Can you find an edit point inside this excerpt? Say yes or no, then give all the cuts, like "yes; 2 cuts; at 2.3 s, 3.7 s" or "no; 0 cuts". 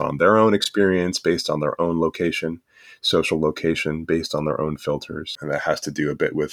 yes; 1 cut; at 5.3 s